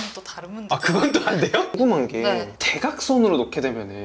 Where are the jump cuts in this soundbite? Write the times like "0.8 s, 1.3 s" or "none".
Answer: 1.8 s